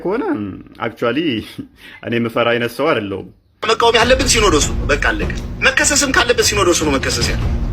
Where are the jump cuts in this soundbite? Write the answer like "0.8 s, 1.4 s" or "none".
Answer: 3.5 s